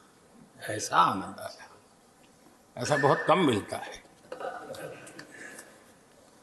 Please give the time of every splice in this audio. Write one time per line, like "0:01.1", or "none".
none